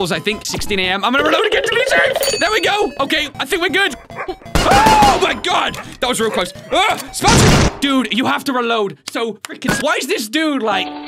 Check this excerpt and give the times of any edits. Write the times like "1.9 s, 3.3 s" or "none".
2.3 s, 3.9 s